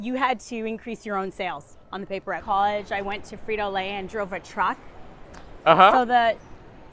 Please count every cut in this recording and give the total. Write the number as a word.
one